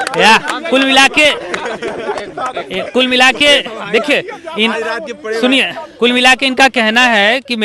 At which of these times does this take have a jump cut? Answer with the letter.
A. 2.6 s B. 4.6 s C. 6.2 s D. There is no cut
D